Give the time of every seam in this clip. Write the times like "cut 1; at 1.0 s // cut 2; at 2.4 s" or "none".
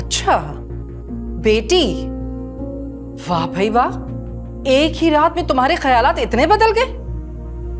none